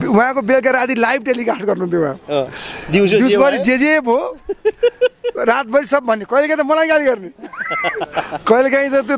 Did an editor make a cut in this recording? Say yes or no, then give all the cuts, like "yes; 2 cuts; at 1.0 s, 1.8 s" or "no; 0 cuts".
no; 0 cuts